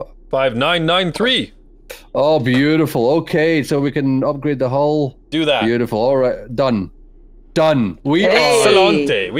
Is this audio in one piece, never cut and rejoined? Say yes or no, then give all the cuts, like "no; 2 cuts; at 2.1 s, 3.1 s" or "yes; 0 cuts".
yes; 0 cuts